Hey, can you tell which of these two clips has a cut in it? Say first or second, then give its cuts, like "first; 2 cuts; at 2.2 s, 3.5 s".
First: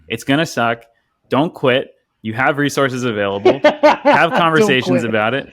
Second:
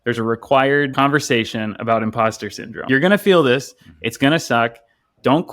second; 2 cuts; at 0.9 s, 2.8 s